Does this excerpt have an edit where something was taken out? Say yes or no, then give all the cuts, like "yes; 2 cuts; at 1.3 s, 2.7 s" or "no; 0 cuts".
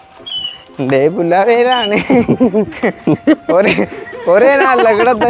no; 0 cuts